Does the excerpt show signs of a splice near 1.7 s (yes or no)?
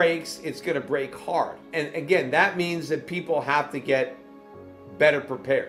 yes